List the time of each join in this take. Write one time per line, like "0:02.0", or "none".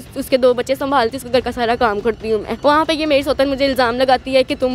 0:02.5